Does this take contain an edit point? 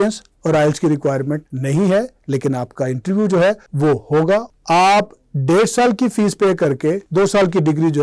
yes; 4 cuts; at 1.5 s, 3.7 s, 4.5 s, 7.0 s

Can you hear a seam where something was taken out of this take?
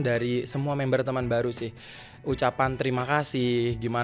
no; 0 cuts

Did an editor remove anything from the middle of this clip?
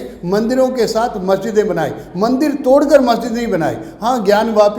no; 0 cuts

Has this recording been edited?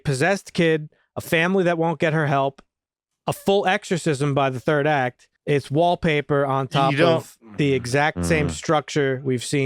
yes; 1 cut; at 5.3 s

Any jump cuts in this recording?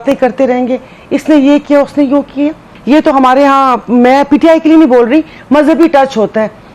yes; 1 cut; at 2.7 s

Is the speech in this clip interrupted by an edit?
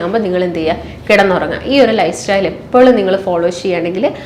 no; 0 cuts

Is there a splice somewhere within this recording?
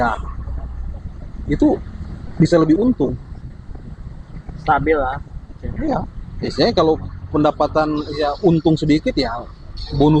no; 0 cuts

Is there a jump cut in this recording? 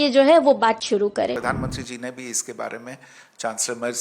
yes; 1 cut; at 1.4 s

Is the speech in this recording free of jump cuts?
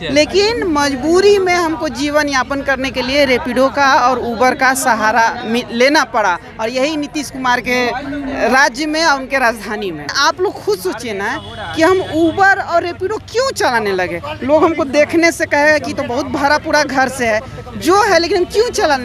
no; 1 cut; at 10.1 s

